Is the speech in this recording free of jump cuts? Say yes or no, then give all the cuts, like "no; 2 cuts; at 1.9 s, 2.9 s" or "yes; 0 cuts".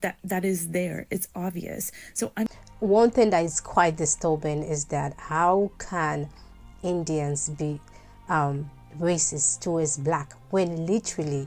no; 1 cut; at 2.5 s